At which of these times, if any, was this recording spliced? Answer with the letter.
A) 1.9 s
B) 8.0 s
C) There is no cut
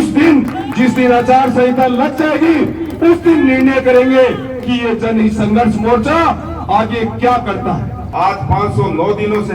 B